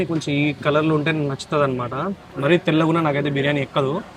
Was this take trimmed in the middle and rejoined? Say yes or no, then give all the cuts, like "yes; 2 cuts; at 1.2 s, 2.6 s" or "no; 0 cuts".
no; 0 cuts